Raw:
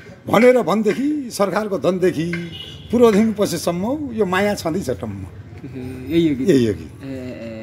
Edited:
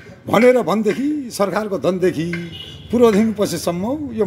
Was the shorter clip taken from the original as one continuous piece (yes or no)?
yes